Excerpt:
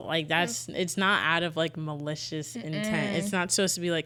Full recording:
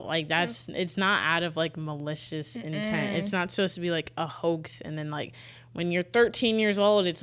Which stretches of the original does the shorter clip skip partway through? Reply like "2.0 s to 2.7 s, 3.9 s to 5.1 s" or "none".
none